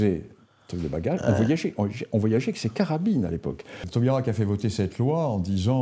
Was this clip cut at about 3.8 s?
yes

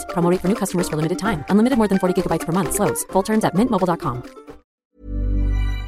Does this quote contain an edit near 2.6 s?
no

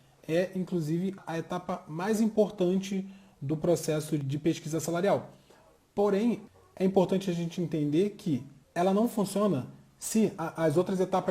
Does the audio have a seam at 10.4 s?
yes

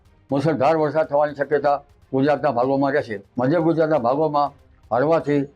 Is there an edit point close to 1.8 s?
no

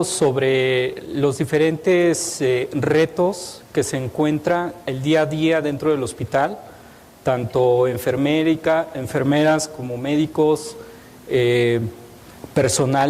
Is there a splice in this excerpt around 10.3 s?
yes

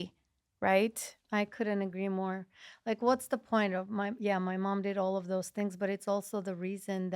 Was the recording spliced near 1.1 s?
no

